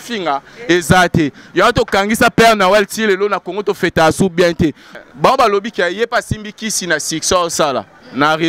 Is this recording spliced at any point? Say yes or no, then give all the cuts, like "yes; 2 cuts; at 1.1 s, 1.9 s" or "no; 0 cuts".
yes; 1 cut; at 4.9 s